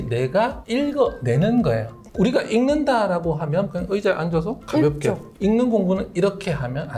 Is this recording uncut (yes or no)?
no